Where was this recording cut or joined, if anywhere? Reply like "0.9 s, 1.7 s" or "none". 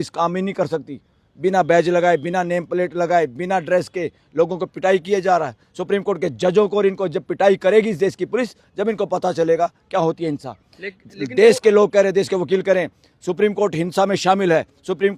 none